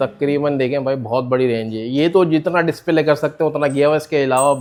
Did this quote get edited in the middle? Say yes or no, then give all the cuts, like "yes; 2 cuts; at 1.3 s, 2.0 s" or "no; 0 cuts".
no; 0 cuts